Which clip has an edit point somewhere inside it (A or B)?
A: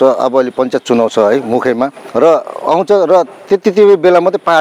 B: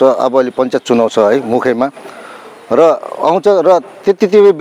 A